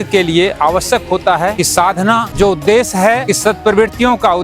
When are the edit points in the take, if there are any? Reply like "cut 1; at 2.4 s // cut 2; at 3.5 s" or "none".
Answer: cut 1; at 2.3 s